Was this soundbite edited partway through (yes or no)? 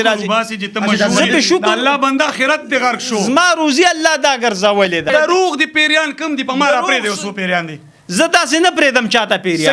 yes